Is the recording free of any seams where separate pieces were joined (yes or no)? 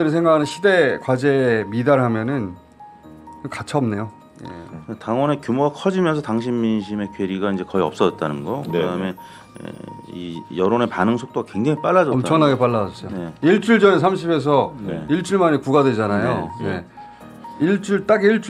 yes